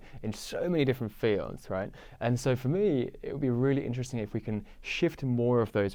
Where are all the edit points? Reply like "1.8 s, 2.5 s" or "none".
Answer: none